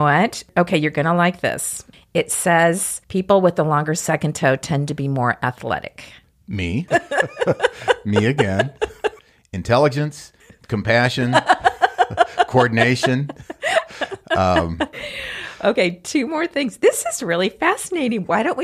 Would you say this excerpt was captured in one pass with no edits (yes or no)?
no